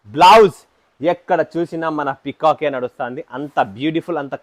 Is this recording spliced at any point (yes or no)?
no